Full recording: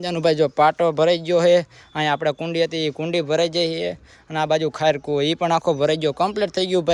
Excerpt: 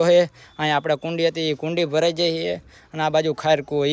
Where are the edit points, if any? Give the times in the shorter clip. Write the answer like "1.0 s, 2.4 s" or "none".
none